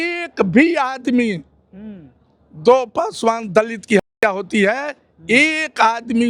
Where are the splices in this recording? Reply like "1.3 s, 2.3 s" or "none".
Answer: none